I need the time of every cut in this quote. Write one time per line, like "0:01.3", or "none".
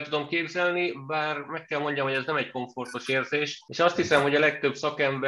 0:03.6

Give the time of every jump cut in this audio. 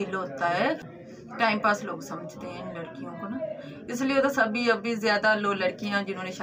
0:00.9

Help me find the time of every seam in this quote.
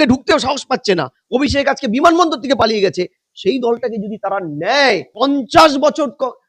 0:05.1

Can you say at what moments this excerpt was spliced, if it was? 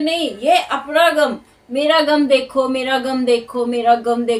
none

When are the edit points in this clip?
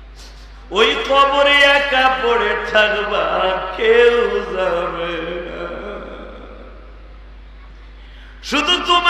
none

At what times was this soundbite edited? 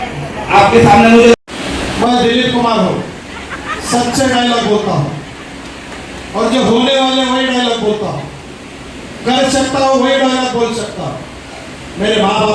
0:01.4

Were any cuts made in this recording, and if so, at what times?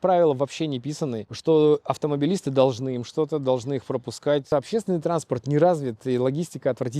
0:01.3
0:04.5

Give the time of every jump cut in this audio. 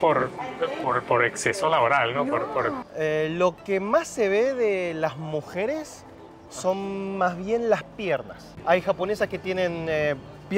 0:02.8
0:08.5

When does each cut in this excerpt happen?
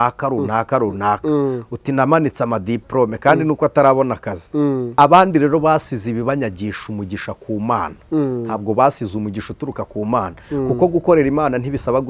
0:04.9

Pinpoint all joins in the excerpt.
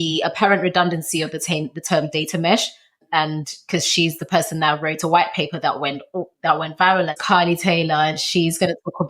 0:02.9
0:07.2

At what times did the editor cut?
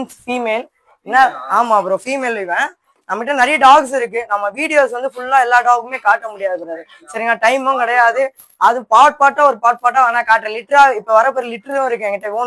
none

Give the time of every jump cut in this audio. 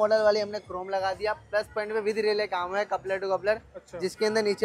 none

